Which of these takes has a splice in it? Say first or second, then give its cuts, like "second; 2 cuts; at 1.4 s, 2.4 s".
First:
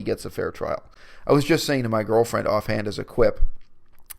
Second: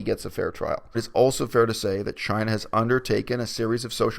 second; 1 cut; at 1.0 s